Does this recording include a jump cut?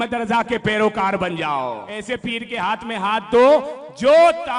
yes; 1 cut; at 1.9 s

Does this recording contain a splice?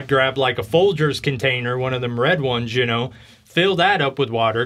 no; 0 cuts

